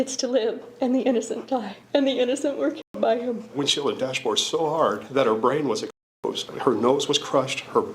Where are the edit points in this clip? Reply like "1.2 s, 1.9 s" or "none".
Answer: 1.8 s, 3.5 s, 5.0 s, 6.5 s